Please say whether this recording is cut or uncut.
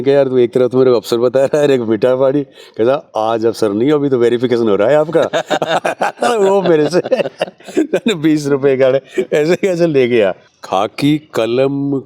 cut